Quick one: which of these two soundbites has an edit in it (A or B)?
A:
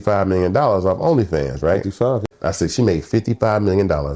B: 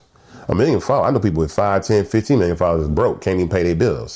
A